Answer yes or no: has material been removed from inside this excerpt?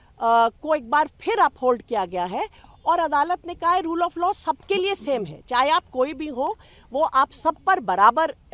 no